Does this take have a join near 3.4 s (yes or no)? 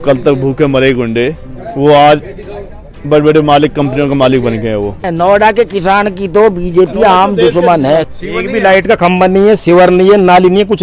no